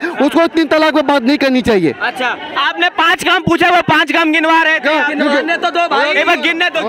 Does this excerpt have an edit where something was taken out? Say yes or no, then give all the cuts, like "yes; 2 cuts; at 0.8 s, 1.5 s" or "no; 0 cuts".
no; 0 cuts